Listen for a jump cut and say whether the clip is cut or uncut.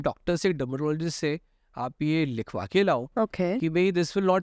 uncut